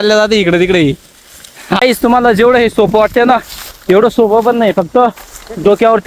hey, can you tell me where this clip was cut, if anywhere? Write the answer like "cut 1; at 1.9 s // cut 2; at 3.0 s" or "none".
cut 1; at 1.8 s